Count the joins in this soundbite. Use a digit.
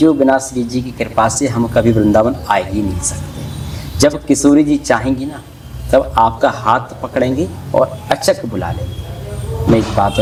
0